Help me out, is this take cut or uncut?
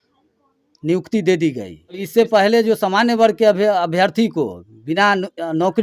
cut